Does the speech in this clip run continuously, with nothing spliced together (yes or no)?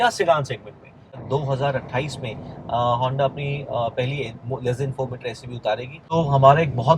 no